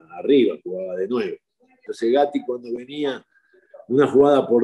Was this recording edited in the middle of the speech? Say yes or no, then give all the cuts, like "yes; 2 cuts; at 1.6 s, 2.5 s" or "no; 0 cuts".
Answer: yes; 1 cut; at 1.9 s